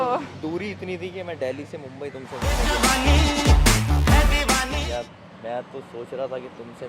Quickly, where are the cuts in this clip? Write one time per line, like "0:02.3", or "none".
0:02.3
0:04.8

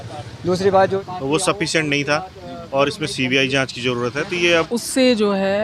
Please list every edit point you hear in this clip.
0:01.0
0:04.7

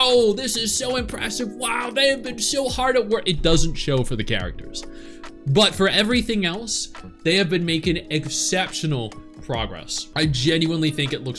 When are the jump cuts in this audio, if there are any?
none

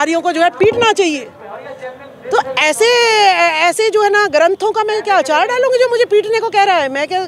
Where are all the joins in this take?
none

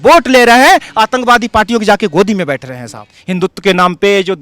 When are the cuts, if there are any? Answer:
0:03.2

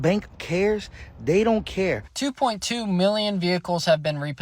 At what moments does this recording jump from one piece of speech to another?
0:02.1

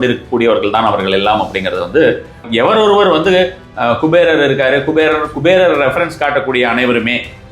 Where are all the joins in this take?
0:02.5

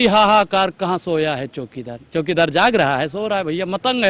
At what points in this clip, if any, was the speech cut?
none

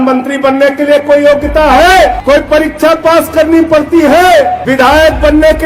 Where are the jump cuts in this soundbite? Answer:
0:02.2
0:04.6

